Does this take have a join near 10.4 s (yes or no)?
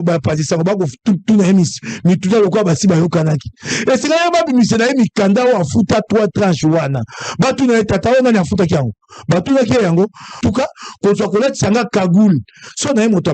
yes